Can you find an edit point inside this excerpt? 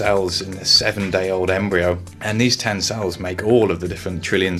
yes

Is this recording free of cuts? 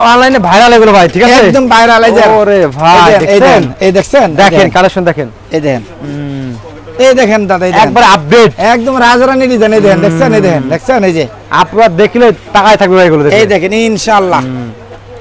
yes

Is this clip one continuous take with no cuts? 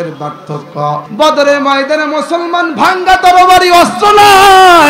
no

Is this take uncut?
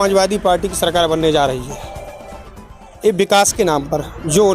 no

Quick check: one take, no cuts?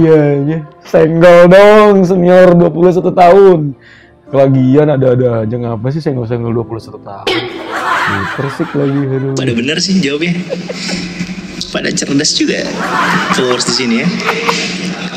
yes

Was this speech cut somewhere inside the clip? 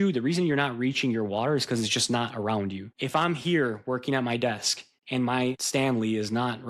yes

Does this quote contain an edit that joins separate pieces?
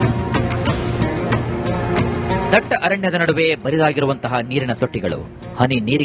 yes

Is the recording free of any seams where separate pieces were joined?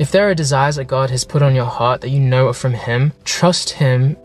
yes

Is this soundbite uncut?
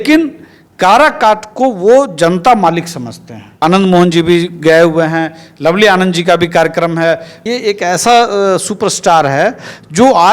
no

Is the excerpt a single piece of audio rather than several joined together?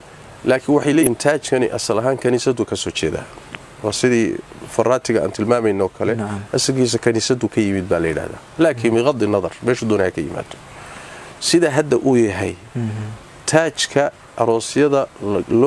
no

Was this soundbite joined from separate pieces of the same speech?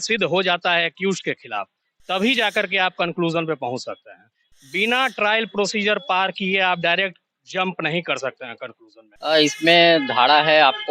yes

